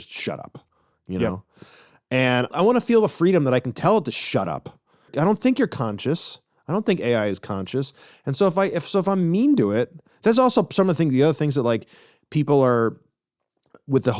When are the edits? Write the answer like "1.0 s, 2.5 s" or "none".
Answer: 2.5 s, 5.1 s